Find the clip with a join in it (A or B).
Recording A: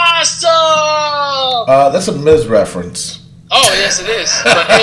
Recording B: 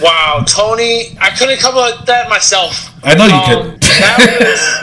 B